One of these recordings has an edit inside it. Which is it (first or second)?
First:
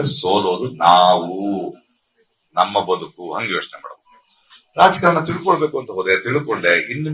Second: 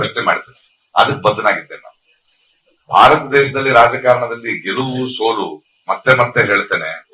first